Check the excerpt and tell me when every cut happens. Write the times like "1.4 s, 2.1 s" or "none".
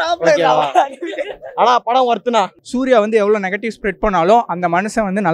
2.6 s

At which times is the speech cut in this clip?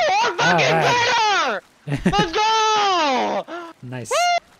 none

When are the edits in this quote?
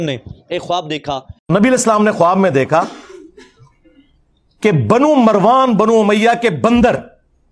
1.3 s

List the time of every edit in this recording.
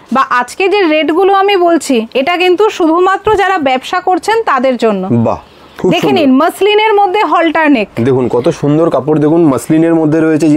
none

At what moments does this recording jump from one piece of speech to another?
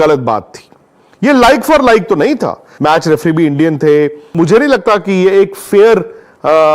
2.7 s, 4.3 s

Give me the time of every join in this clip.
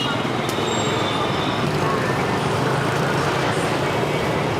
none

